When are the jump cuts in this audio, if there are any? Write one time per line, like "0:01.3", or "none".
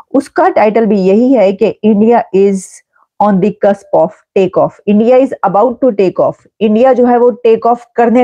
none